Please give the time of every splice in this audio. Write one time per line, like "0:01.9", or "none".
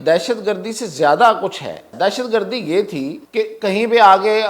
0:01.9
0:03.2